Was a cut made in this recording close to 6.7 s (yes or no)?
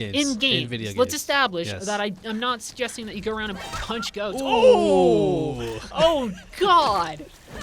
no